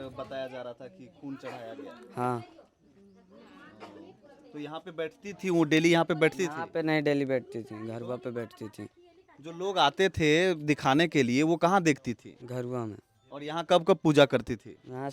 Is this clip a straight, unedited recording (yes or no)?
yes